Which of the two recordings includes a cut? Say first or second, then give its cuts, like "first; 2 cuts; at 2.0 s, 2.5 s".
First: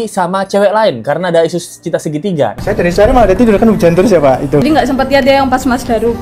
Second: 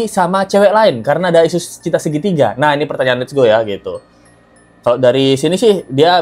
first; 2 cuts; at 2.5 s, 4.6 s